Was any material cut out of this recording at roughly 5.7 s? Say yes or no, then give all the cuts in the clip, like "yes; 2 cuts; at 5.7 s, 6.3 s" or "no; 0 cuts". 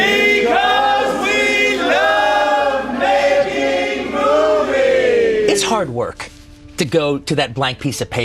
yes; 1 cut; at 5.7 s